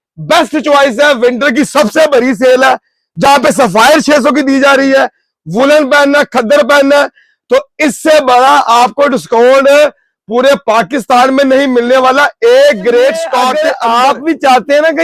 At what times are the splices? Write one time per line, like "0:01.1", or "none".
0:13.5